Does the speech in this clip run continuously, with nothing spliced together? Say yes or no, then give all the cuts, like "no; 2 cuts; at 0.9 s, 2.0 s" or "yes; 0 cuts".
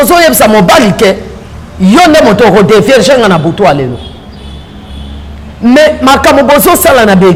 yes; 0 cuts